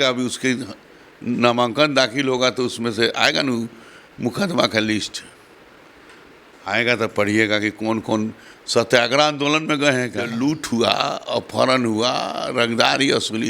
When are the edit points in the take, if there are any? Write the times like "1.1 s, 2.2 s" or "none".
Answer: 10.3 s